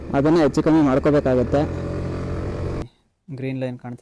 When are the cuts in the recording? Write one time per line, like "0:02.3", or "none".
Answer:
0:02.8